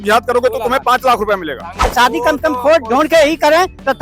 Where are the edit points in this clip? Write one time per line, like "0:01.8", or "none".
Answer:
0:01.9

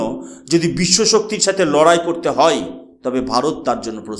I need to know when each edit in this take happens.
none

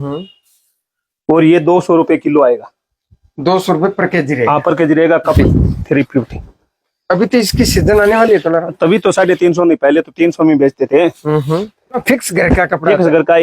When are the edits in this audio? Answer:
0:05.4
0:12.0

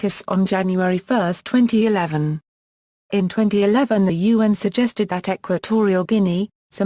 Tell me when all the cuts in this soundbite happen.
0:03.9

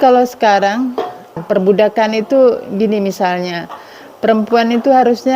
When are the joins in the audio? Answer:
0:01.4

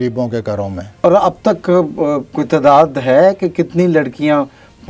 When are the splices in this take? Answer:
0:01.0

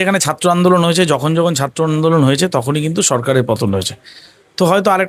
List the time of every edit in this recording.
none

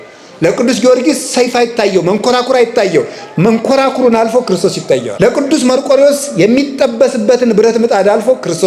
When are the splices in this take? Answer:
0:05.1

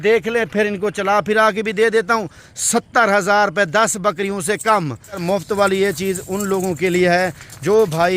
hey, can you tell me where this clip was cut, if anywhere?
0:05.2

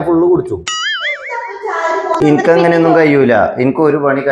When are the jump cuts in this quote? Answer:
0:02.2

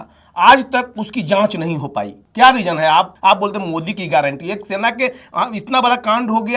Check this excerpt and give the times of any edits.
0:02.2
0:03.1

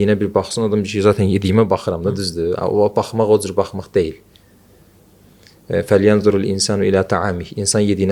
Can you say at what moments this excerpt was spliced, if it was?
none

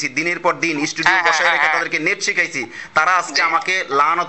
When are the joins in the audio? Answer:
none

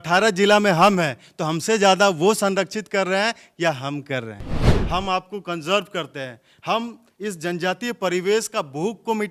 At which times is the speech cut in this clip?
0:04.7

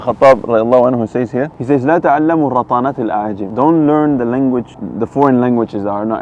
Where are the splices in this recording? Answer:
0:01.5
0:03.4
0:04.8

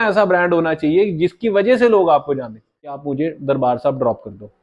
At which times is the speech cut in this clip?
0:03.0

